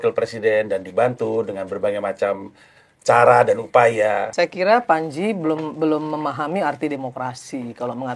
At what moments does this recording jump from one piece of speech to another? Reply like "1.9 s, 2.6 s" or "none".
4.3 s